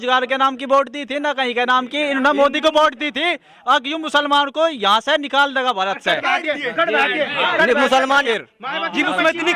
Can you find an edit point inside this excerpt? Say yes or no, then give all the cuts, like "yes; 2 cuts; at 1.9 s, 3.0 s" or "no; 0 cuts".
yes; 1 cut; at 8.4 s